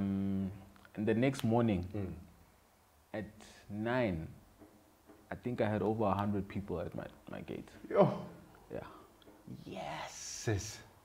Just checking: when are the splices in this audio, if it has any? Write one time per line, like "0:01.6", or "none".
none